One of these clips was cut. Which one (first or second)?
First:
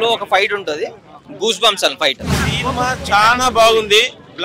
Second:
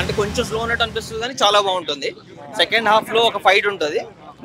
first